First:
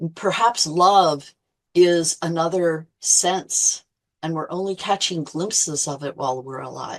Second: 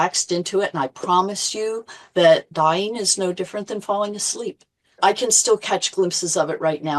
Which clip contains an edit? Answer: second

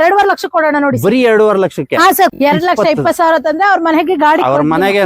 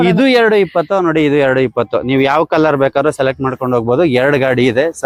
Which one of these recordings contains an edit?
first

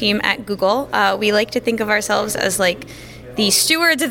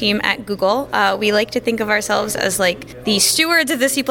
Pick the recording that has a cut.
second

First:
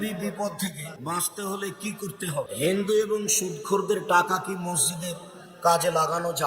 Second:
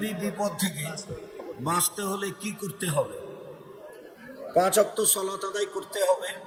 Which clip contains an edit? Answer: first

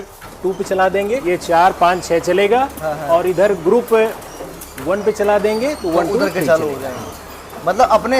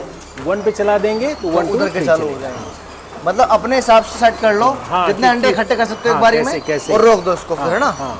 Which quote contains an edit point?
first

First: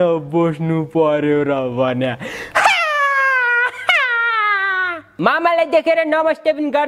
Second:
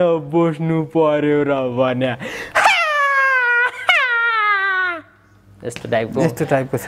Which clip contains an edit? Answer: first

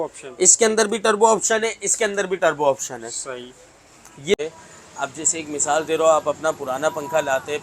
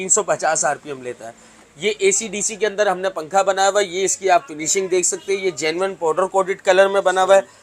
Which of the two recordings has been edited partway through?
first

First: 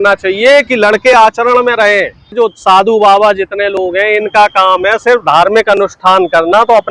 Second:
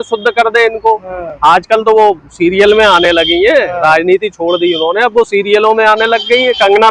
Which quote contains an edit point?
first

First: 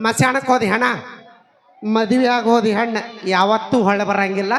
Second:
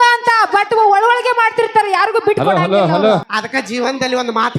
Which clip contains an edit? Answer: second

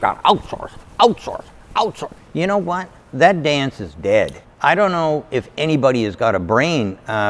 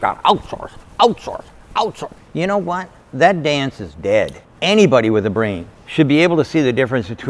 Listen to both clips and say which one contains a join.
second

